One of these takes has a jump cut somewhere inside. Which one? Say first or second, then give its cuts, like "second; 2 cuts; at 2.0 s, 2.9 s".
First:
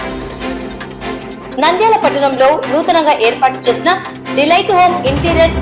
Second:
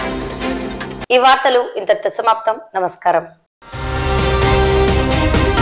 first; 1 cut; at 1.0 s